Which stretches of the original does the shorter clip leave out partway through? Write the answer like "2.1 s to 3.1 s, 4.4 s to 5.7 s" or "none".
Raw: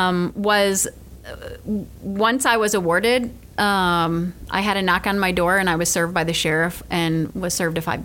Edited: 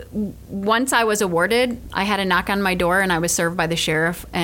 3.4 s to 4.4 s